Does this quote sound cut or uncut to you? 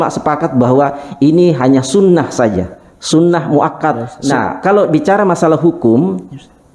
cut